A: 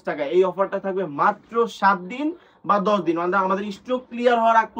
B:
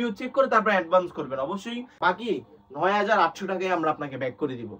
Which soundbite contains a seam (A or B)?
B